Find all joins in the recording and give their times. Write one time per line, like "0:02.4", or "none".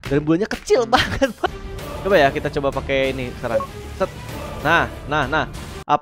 0:01.5